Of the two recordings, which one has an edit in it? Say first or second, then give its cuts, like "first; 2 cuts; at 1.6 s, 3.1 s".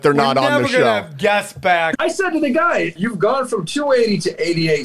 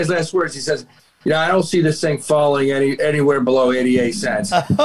first; 2 cuts; at 1.9 s, 3.0 s